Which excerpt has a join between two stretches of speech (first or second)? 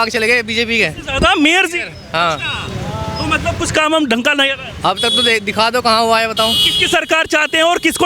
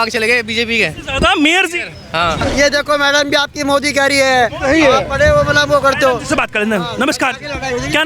second